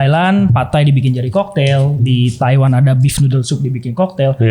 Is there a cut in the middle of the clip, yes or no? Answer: no